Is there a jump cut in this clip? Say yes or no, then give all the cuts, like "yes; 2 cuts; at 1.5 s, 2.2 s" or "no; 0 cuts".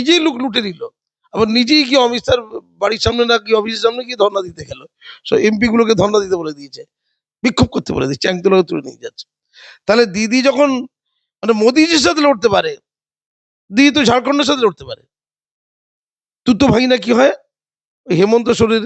no; 0 cuts